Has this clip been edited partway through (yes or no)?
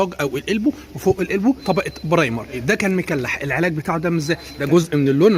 yes